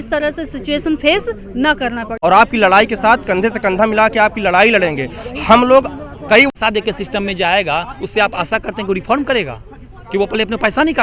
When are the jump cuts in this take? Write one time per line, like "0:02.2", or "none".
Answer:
0:02.1
0:06.5